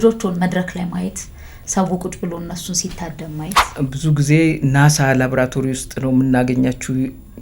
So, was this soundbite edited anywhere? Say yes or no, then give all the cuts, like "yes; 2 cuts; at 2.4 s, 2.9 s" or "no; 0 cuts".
yes; 1 cut; at 3.7 s